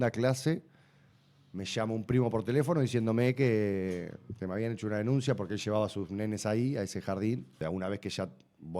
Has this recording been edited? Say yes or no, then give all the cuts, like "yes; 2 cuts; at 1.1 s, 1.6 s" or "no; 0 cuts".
yes; 1 cut; at 7.5 s